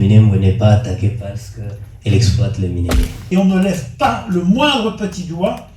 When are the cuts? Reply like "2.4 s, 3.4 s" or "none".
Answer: 3.1 s